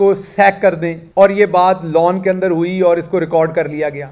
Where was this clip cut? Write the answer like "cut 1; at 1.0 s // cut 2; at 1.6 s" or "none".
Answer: cut 1; at 0.9 s